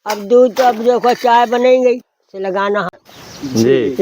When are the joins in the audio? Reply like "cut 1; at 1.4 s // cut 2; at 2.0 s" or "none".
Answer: cut 1; at 3.0 s